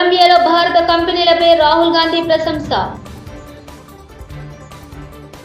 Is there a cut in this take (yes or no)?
no